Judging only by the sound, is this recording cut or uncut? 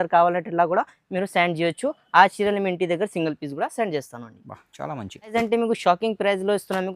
cut